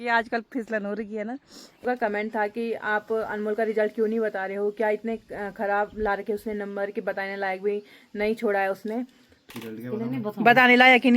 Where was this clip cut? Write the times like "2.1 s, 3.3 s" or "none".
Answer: 1.8 s, 9.4 s